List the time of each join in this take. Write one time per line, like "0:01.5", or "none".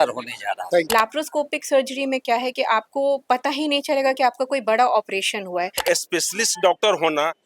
0:00.9
0:05.8